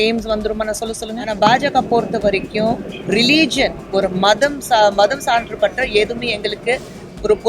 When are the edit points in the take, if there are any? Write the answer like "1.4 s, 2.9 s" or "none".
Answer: 1.3 s